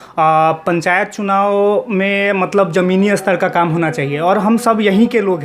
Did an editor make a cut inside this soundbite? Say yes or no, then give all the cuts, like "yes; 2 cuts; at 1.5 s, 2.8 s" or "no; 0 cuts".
no; 0 cuts